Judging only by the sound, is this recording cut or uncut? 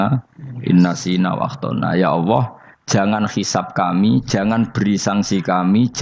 uncut